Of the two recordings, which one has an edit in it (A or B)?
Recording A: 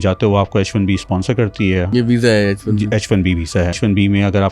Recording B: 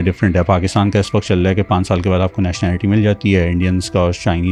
A